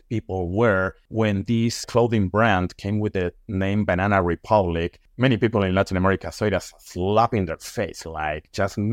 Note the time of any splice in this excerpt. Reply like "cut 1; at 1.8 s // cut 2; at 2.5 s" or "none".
cut 1; at 1.0 s // cut 2; at 5.0 s